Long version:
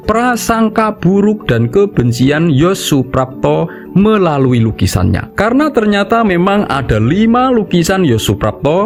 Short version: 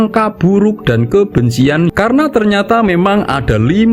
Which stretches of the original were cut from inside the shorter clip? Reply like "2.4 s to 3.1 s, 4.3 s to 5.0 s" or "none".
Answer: 2.5 s to 5.3 s